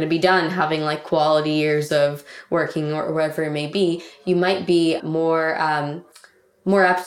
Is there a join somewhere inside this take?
no; 0 cuts

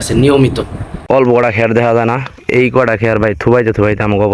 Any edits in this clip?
yes; 1 cut; at 1.1 s

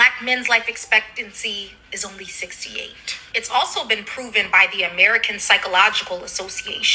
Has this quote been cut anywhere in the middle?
yes; 1 cut; at 4.2 s

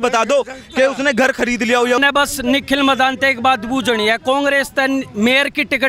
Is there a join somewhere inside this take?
yes; 1 cut; at 2.0 s

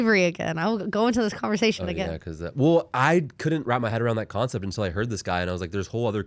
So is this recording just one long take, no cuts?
yes; 0 cuts

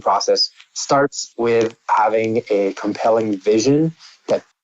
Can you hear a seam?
yes; 1 cut; at 1.2 s

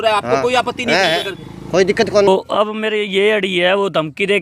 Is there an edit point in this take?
yes; 1 cut; at 2.3 s

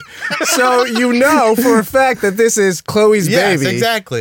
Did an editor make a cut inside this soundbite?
no; 0 cuts

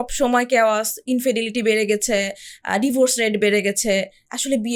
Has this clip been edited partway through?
no; 0 cuts

